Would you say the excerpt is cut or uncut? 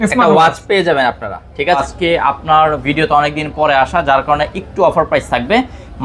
cut